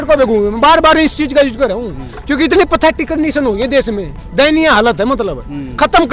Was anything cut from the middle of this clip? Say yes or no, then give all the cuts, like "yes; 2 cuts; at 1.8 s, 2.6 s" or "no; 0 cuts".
no; 0 cuts